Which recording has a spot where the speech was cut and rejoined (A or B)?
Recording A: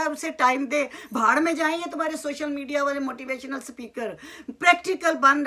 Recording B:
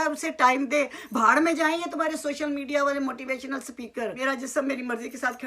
B